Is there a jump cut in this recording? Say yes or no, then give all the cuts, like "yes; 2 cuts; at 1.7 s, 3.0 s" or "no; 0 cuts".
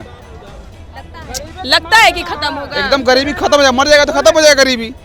no; 0 cuts